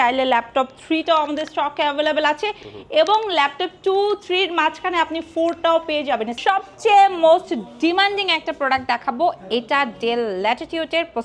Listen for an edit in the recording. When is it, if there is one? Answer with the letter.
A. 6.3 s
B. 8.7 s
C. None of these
A